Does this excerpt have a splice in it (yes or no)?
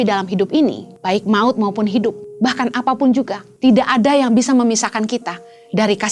yes